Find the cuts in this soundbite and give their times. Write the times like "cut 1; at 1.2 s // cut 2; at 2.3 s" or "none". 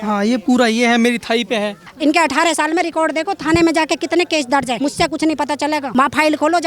cut 1; at 1.8 s // cut 2; at 4.8 s // cut 3; at 5.9 s